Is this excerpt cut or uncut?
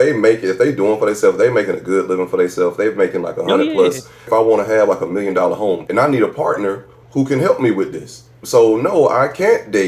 cut